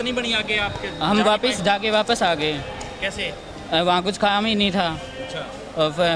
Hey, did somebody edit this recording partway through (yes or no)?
no